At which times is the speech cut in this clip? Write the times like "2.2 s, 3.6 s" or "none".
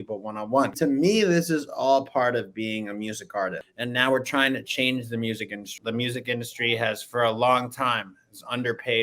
0.8 s, 3.7 s, 5.7 s